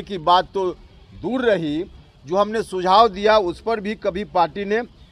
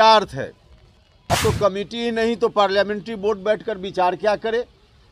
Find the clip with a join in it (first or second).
second